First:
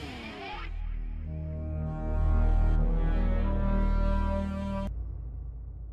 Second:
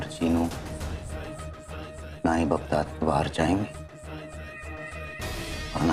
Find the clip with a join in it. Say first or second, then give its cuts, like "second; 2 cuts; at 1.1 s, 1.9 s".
first; 1 cut; at 4.9 s